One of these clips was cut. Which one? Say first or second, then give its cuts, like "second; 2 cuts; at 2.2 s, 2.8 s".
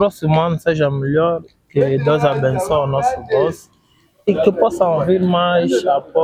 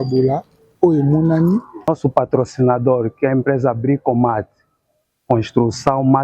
second; 1 cut; at 1.9 s